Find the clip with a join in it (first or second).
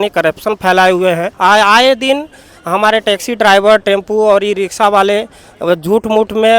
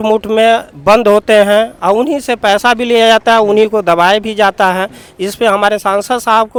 first